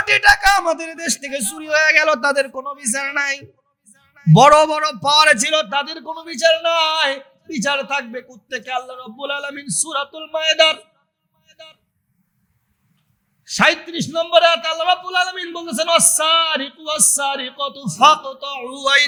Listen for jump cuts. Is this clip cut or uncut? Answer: uncut